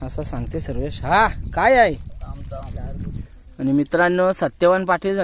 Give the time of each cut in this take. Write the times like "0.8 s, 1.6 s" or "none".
3.2 s

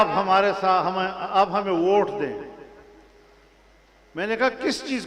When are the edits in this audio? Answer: none

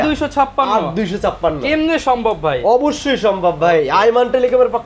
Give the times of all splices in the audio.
none

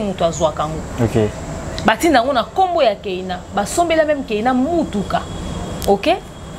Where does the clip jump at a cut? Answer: none

